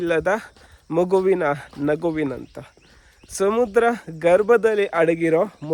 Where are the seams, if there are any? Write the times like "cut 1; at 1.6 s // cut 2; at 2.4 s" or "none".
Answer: none